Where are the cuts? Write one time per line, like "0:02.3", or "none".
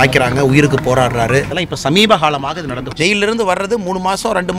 0:01.6
0:02.9